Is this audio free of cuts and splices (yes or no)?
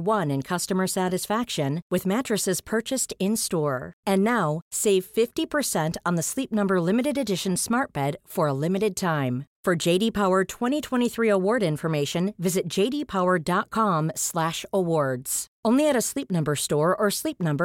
yes